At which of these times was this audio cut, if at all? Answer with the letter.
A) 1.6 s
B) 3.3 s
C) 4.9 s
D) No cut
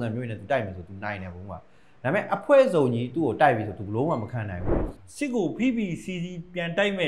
C